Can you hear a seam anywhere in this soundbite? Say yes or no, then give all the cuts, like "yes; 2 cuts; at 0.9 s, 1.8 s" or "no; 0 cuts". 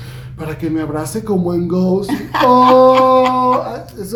no; 0 cuts